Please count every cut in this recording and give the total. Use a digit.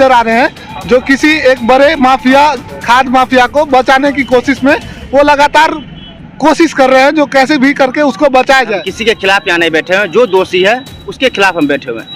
1